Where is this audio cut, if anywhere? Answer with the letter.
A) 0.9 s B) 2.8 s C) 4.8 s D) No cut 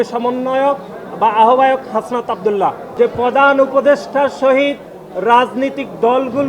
B